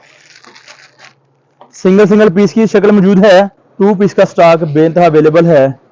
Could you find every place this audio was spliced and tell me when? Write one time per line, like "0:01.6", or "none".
0:03.6